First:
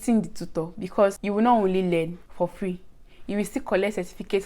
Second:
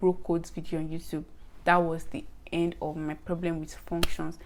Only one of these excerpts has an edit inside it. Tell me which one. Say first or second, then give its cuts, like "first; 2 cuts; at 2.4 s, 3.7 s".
first; 2 cuts; at 1.2 s, 2.2 s